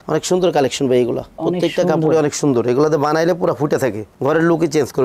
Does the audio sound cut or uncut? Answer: uncut